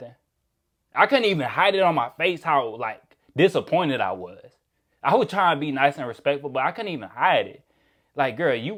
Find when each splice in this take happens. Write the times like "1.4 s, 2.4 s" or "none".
none